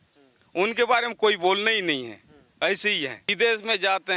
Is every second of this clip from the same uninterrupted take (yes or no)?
no